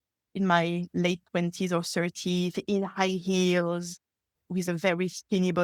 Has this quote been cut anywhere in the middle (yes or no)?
no